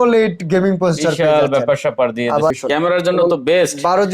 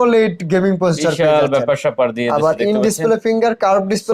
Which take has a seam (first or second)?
first